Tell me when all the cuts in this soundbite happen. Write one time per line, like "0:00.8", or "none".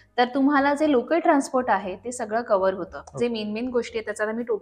0:03.0